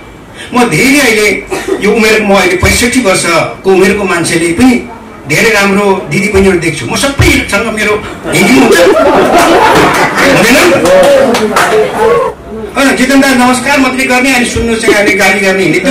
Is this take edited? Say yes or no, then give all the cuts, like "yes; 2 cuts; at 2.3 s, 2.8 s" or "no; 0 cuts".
yes; 1 cut; at 12.4 s